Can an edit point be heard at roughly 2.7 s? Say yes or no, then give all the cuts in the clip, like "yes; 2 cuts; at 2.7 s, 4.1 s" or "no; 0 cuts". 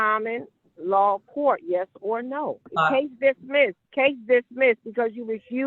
yes; 2 cuts; at 2.7 s, 3.8 s